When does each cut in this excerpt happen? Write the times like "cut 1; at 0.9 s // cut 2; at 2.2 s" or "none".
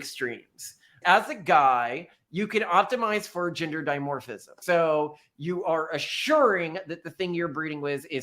cut 1; at 1.0 s // cut 2; at 4.6 s